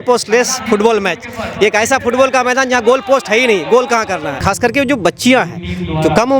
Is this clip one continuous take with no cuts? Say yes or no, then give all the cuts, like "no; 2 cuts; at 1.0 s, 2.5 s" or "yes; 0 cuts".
no; 1 cut; at 4.4 s